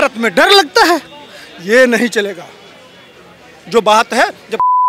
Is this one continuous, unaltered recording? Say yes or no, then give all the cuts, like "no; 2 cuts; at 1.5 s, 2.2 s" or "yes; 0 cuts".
yes; 0 cuts